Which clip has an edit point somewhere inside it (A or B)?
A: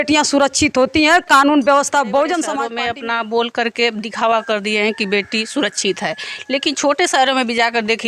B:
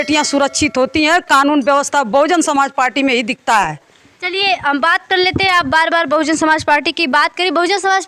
A